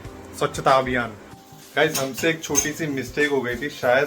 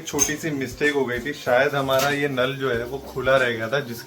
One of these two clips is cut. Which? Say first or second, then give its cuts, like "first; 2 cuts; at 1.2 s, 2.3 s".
first; 1 cut; at 1.2 s